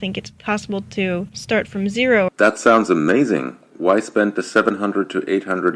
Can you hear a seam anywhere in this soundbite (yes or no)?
yes